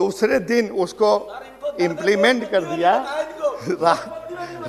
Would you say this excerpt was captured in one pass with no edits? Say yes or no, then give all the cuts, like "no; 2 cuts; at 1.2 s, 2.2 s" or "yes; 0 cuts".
yes; 0 cuts